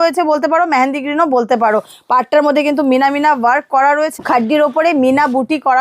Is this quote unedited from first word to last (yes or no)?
no